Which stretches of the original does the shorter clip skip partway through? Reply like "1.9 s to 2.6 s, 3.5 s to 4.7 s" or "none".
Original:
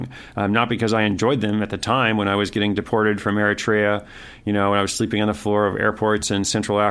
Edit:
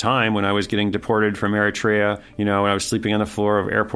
4.1 s to 4.3 s